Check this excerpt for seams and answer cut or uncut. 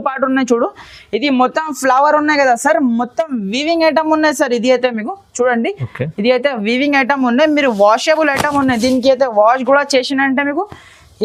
uncut